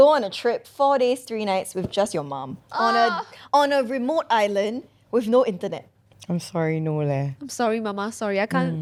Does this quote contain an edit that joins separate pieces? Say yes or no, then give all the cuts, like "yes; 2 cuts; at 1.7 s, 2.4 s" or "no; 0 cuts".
no; 0 cuts